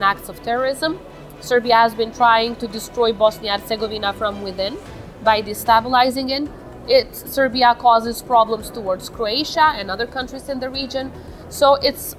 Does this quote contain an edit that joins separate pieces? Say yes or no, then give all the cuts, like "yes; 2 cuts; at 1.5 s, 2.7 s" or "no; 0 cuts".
no; 0 cuts